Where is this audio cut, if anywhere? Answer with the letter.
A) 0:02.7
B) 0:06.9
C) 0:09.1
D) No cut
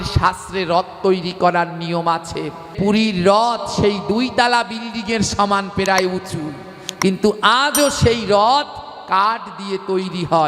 A